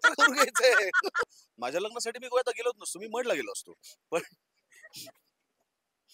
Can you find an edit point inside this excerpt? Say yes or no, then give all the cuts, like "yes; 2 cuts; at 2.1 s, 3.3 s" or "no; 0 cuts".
yes; 1 cut; at 1.3 s